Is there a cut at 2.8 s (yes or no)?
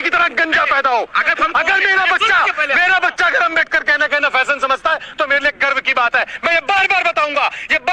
no